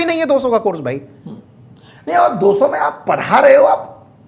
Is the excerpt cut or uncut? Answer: uncut